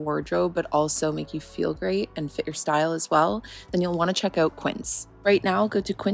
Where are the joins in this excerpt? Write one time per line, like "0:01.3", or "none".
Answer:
0:05.0